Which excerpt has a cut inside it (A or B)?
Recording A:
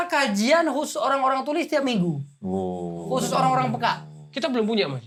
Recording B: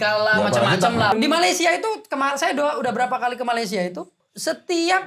B